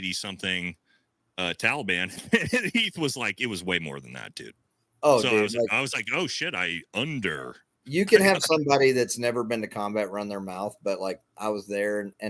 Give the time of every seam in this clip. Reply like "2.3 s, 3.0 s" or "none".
none